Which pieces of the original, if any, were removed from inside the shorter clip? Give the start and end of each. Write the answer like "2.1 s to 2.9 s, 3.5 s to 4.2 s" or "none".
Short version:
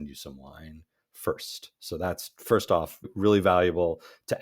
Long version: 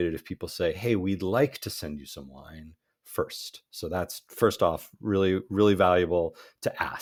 5.0 s to 5.4 s